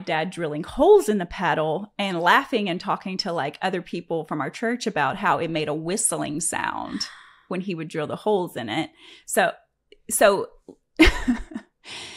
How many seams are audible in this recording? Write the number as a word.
zero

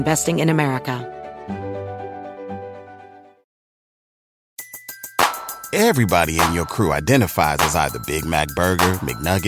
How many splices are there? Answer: one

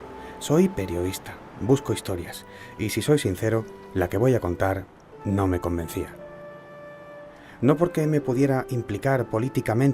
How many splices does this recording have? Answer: one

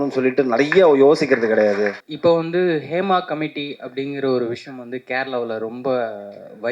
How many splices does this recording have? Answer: one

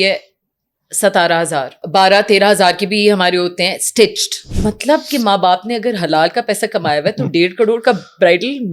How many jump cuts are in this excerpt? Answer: two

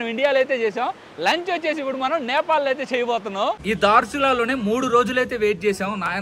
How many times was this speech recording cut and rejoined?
one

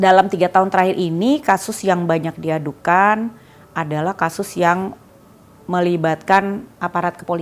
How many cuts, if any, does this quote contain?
zero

